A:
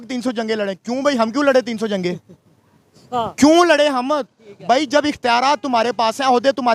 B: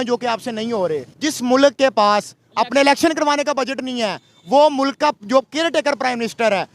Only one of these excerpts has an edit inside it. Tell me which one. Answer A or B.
B